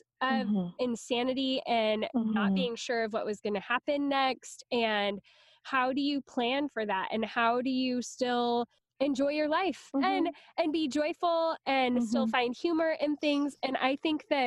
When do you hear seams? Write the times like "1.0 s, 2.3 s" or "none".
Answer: 9.9 s